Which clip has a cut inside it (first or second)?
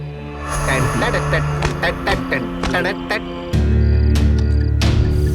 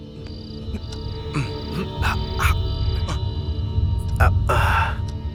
first